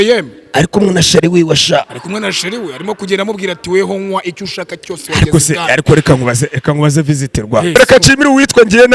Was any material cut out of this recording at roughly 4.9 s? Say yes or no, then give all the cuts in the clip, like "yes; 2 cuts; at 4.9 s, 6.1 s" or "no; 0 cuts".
no; 1 cut; at 7.7 s